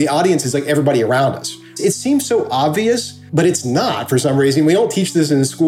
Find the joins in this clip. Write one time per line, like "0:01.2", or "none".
0:03.2

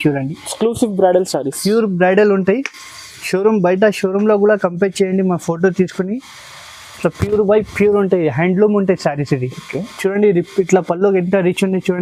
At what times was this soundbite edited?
none

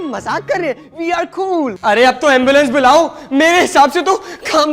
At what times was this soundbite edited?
0:01.8

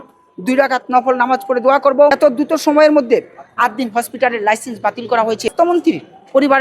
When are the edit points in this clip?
0:02.1
0:05.5

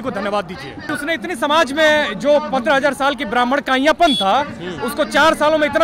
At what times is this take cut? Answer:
0:00.9

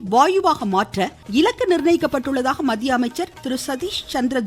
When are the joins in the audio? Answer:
0:01.1
0:03.4

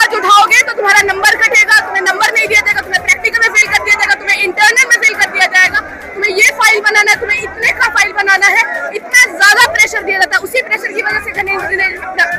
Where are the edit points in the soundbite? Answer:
none

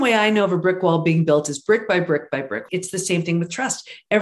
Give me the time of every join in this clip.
0:02.6

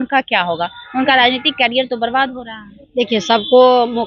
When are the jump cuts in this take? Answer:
none

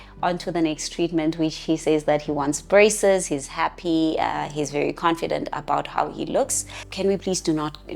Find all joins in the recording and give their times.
0:06.8

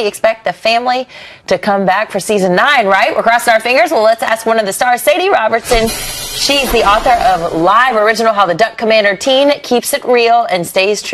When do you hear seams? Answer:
0:06.1

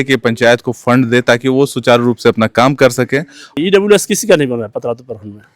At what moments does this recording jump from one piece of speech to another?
0:03.6

